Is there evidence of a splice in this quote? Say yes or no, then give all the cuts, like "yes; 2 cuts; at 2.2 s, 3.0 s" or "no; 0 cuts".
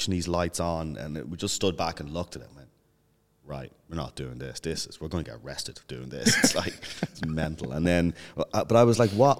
no; 0 cuts